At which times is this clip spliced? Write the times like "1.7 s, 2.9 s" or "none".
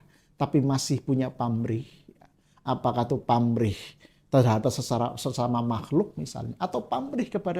none